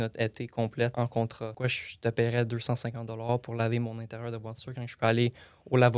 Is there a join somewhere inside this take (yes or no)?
yes